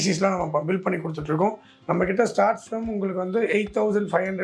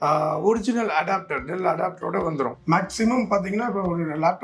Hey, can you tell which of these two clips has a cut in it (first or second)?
second